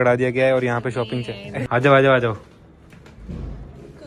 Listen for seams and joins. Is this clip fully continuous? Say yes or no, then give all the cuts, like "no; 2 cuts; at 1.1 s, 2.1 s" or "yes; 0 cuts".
no; 1 cut; at 1.7 s